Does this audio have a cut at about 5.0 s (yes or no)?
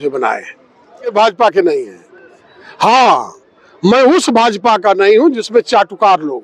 no